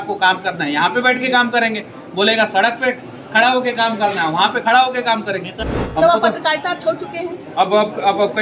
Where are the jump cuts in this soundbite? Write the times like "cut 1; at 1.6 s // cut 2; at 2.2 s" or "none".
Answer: cut 1; at 5.8 s